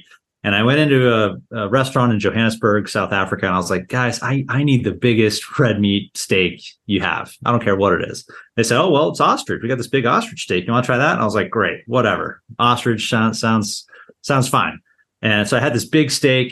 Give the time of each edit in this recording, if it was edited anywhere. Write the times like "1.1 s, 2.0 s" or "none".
none